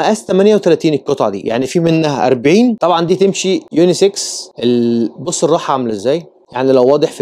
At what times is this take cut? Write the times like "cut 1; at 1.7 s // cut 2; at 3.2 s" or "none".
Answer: cut 1; at 2.8 s

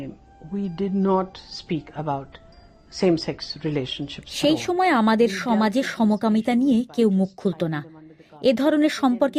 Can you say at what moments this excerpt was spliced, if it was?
none

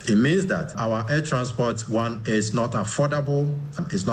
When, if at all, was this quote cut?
none

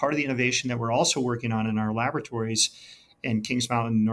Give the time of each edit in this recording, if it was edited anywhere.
none

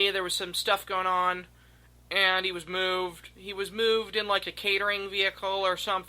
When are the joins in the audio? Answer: none

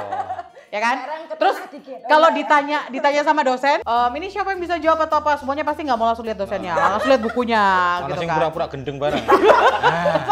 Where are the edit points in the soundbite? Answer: cut 1; at 3.8 s

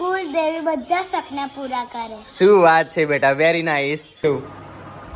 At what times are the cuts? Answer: cut 1; at 4.0 s

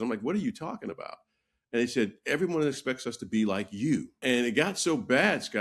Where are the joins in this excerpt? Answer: cut 1; at 4.2 s

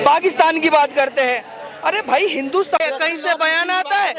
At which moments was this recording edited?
cut 1; at 2.8 s

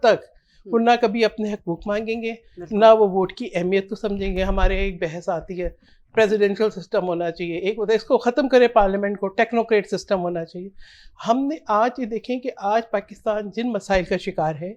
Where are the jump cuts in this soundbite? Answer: none

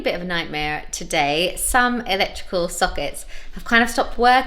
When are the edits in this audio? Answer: none

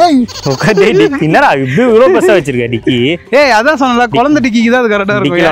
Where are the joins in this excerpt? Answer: none

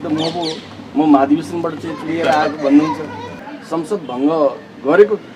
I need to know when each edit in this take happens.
cut 1; at 3.2 s

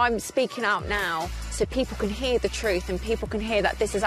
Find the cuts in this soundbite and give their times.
none

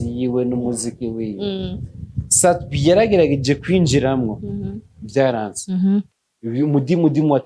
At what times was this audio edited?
none

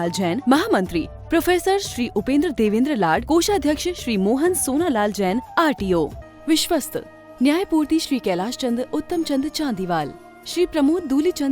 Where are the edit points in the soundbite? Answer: cut 1; at 6.2 s

